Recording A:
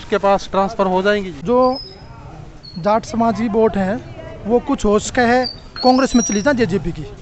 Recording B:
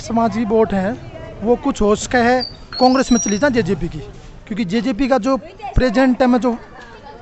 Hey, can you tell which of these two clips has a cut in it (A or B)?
A